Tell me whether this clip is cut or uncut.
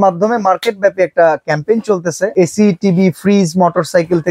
cut